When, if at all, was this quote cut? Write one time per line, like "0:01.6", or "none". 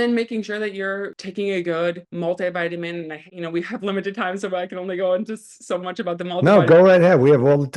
0:01.2
0:02.1
0:03.2